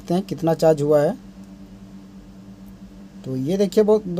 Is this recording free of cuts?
yes; 0 cuts

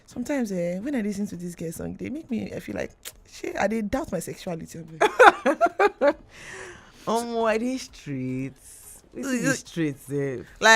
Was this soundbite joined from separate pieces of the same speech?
no; 0 cuts

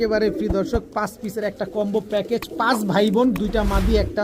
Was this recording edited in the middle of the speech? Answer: no; 0 cuts

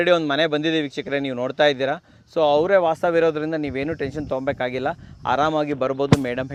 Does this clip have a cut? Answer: no; 0 cuts

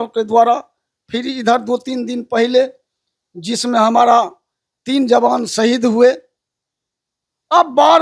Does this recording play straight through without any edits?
yes; 0 cuts

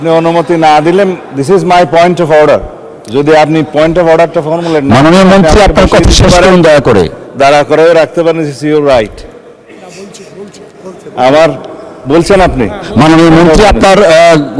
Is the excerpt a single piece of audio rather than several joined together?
yes; 0 cuts

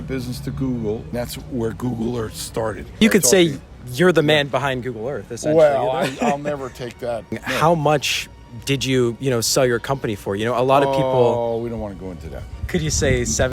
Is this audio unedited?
no; 4 cuts; at 1.1 s, 3.0 s, 7.4 s, 12.6 s

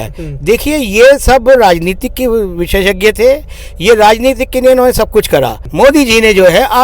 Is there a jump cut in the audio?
yes; 1 cut; at 5.6 s

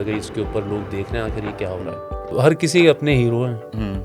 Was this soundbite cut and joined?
yes; 1 cut; at 2.3 s

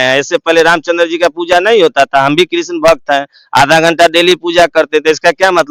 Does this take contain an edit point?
no; 0 cuts

